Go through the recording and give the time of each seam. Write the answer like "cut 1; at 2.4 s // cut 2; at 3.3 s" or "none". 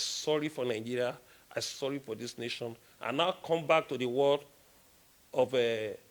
none